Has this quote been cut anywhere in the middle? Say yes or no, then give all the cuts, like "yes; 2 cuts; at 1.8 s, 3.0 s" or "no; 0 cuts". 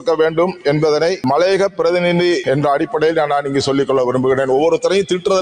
yes; 2 cuts; at 1.2 s, 2.4 s